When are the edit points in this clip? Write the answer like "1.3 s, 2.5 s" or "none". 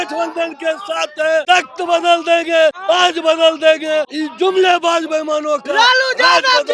1.4 s, 2.8 s, 4.2 s